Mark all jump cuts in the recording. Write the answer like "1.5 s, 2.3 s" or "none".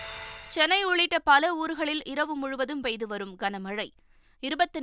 none